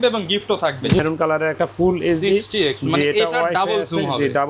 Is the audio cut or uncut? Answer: cut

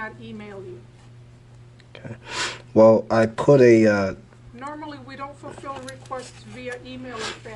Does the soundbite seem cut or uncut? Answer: uncut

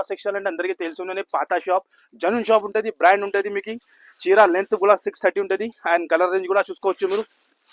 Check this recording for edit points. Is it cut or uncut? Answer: uncut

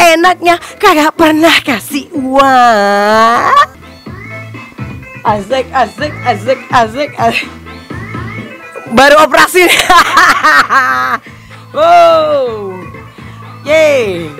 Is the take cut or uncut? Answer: cut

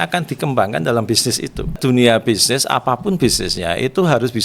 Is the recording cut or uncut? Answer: cut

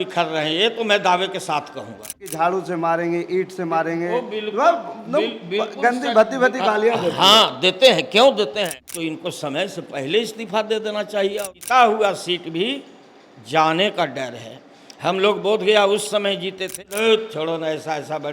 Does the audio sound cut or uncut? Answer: cut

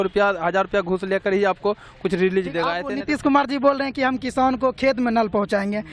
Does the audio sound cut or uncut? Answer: cut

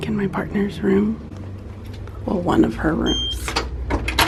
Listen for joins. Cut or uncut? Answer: uncut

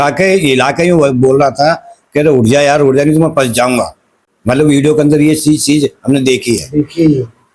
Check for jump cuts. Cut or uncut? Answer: uncut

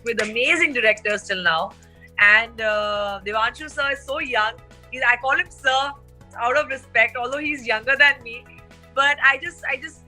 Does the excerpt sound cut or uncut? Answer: uncut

